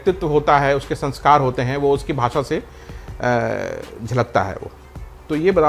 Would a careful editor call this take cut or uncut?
uncut